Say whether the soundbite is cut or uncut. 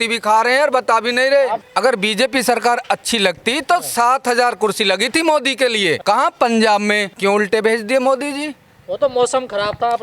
cut